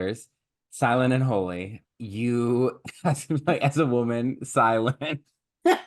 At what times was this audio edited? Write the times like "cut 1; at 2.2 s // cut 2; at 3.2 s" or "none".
cut 1; at 1.8 s